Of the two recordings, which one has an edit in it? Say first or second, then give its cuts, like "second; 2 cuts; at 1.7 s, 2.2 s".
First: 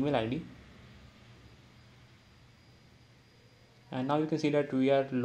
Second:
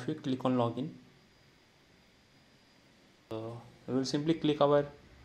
second; 1 cut; at 3.3 s